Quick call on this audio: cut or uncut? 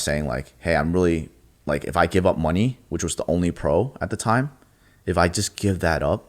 uncut